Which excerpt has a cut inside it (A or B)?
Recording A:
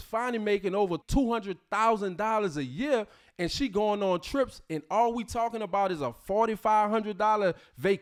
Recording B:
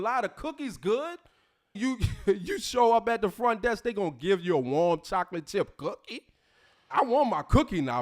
B